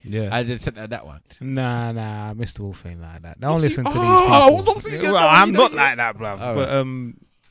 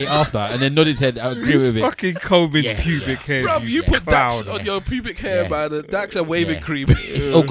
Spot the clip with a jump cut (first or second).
first